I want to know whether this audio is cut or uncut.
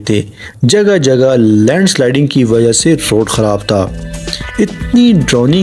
uncut